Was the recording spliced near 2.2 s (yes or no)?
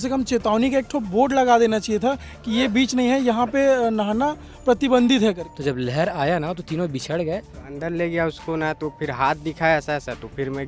no